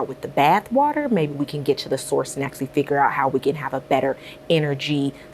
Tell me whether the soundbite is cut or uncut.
uncut